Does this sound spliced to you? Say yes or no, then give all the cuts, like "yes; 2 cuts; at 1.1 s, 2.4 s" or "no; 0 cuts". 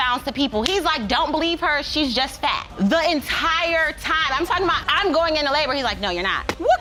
no; 0 cuts